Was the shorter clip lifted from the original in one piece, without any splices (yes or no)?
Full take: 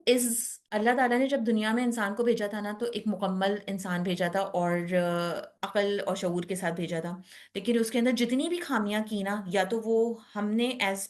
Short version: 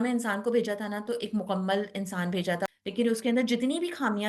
no